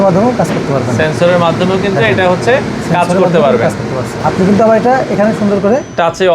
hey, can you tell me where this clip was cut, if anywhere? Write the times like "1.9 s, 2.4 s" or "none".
2.8 s, 4.2 s